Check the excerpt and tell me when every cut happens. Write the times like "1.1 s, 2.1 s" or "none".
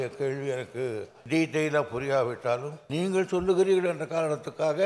1.1 s, 2.8 s